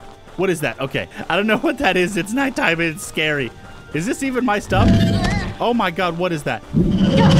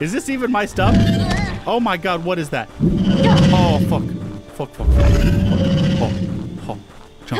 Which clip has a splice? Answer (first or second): first